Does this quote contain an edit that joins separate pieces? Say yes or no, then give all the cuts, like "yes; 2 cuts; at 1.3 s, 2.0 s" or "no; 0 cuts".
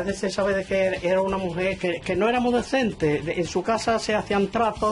yes; 1 cut; at 1.8 s